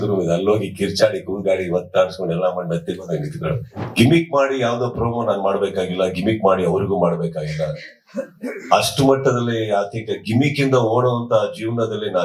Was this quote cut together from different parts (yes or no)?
yes